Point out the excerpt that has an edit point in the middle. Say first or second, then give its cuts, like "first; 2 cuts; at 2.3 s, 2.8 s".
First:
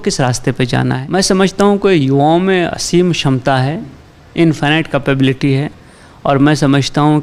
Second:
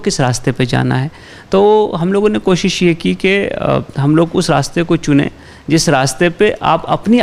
first; 1 cut; at 1.0 s